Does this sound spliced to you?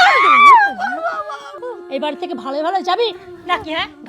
yes; 1 cut; at 1.5 s

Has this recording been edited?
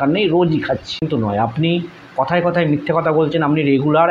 yes; 1 cut; at 1.0 s

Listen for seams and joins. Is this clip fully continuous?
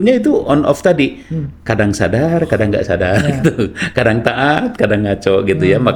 yes; 0 cuts

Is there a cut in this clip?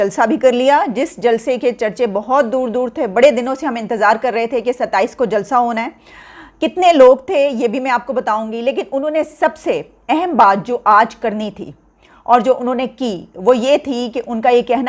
no; 0 cuts

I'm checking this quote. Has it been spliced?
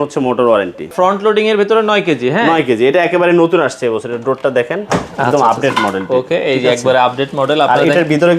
yes; 1 cut; at 0.9 s

